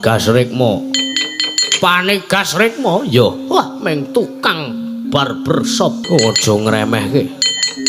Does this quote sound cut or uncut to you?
cut